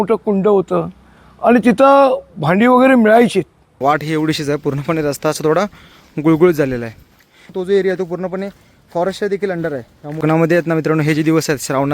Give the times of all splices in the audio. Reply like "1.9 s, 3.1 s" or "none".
3.6 s, 7.5 s, 10.2 s

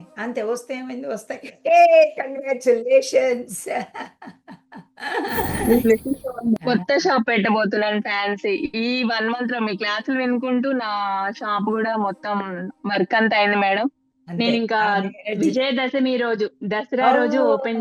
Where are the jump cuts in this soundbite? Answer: 6.6 s

